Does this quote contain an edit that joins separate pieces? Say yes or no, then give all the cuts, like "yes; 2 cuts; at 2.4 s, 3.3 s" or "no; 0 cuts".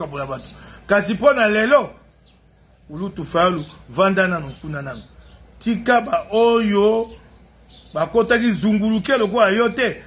no; 0 cuts